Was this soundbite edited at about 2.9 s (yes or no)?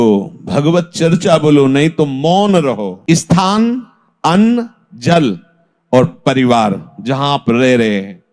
yes